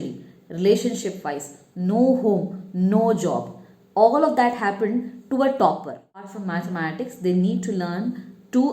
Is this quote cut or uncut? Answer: cut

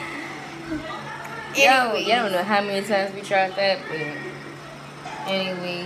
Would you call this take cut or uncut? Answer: uncut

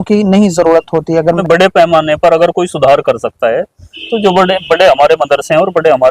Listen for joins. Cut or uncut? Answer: cut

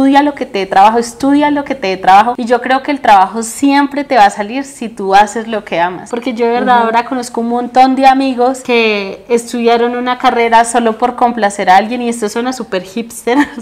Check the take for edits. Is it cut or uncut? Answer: uncut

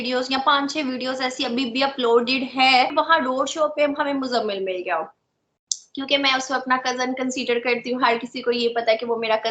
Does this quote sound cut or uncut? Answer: cut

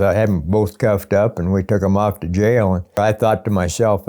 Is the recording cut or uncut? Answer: cut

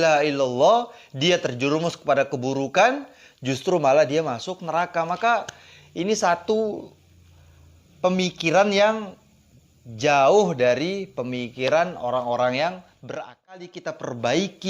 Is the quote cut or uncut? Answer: cut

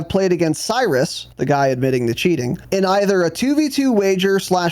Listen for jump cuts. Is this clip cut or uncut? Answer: cut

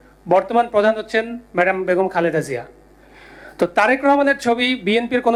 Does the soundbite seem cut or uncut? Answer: uncut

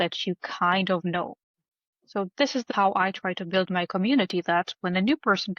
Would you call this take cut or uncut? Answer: cut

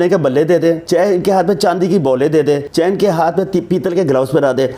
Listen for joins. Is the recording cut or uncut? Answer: cut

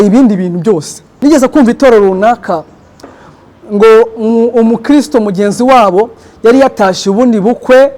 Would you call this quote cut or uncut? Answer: cut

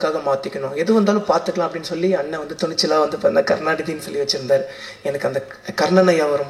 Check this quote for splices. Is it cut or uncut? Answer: uncut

